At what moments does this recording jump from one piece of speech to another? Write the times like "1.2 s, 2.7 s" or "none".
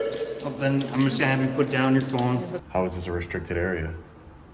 2.6 s